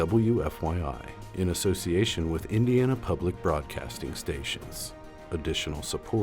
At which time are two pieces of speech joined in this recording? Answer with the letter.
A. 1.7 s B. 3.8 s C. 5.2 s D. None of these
C